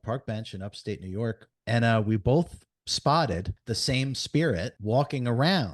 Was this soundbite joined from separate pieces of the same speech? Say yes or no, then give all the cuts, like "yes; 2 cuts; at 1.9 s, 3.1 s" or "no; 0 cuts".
yes; 3 cuts; at 1.5 s, 3.5 s, 4.8 s